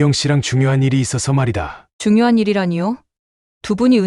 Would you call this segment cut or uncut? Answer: cut